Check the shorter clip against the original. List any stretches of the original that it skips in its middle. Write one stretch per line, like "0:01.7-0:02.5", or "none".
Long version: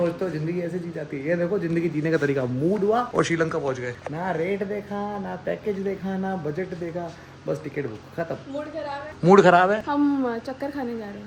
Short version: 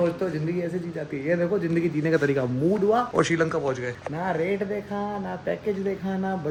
none